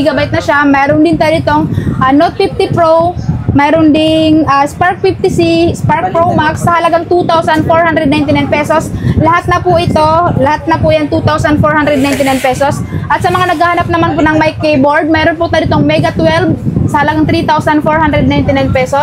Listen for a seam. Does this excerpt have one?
no; 0 cuts

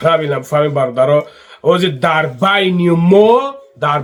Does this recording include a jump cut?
no; 0 cuts

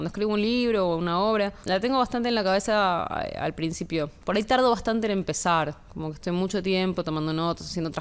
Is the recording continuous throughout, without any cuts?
no; 2 cuts; at 1.6 s, 4.2 s

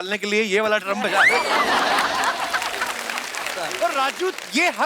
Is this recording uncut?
no; 1 cut; at 3.6 s

